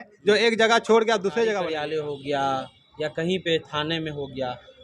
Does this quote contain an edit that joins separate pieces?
yes; 1 cut; at 1.7 s

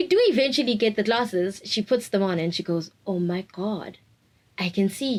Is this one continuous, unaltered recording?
yes; 0 cuts

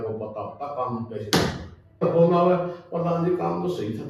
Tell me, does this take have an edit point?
yes; 1 cut; at 2.0 s

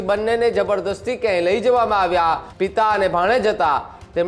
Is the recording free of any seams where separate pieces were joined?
no; 1 cut; at 2.5 s

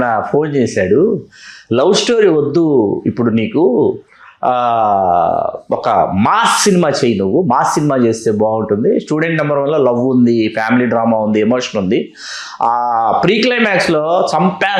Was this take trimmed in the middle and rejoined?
no; 0 cuts

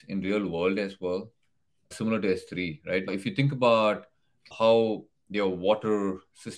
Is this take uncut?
no; 3 cuts; at 1.9 s, 3.1 s, 4.5 s

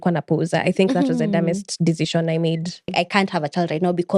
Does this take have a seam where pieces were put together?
yes; 1 cut; at 2.9 s

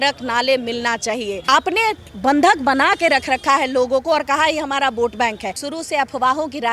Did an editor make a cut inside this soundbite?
yes; 2 cuts; at 1.5 s, 5.6 s

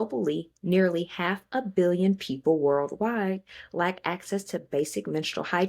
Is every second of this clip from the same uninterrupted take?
yes; 0 cuts

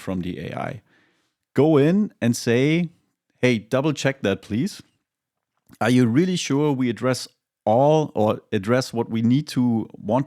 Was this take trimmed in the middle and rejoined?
no; 0 cuts

